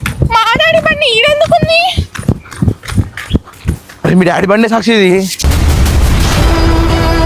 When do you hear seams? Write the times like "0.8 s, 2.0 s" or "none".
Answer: none

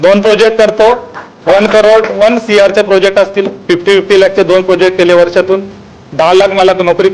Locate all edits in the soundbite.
6.1 s

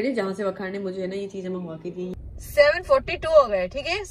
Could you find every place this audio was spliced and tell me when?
2.1 s

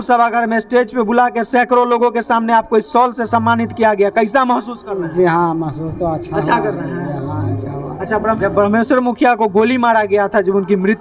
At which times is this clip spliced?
8.4 s

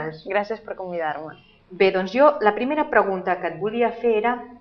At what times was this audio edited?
1.3 s

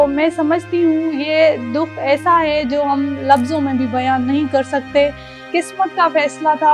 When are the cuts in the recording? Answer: 5.4 s

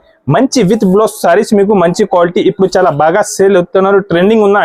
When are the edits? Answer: none

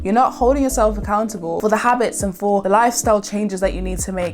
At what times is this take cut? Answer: 2.6 s

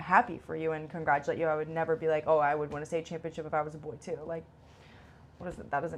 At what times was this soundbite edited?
none

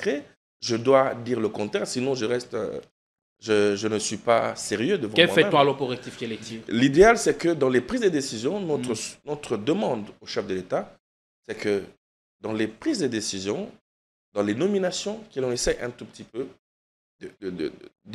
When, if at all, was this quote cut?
none

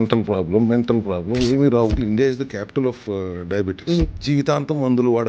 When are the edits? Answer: 2.0 s, 4.2 s

